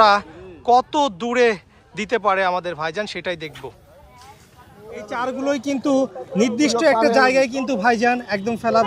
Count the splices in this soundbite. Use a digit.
1